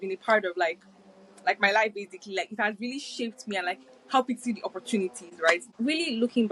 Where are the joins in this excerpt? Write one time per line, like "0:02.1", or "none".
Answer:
0:05.6